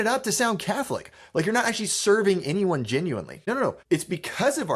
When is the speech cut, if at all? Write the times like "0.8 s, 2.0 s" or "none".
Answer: 3.6 s